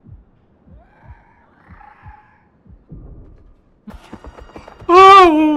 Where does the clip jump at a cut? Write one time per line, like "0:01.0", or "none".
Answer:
0:03.9